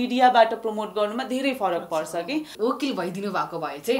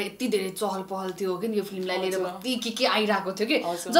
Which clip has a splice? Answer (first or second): first